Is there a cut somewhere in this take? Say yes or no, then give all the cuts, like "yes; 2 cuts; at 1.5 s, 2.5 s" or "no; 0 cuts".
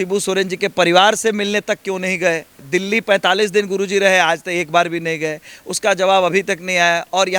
yes; 1 cut; at 2.6 s